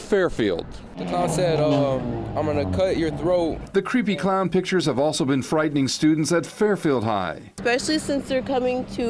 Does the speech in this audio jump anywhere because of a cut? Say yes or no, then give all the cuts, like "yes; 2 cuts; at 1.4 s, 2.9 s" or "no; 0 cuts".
no; 0 cuts